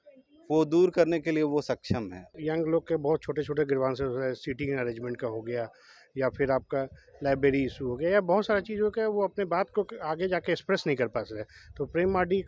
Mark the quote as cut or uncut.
cut